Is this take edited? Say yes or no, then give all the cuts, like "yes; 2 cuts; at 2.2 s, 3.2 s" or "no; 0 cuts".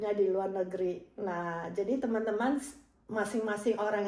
no; 0 cuts